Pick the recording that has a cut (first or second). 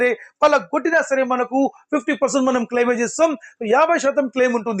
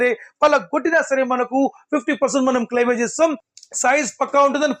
second